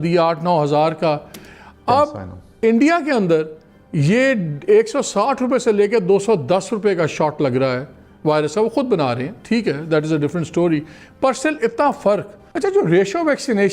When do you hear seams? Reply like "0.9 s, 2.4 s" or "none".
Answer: 12.5 s